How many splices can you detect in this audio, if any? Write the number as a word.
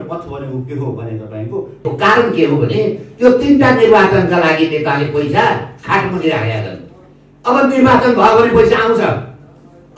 one